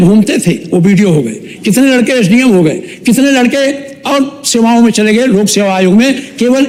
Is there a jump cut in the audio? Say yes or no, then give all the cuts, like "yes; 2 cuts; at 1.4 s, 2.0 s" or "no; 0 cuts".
no; 0 cuts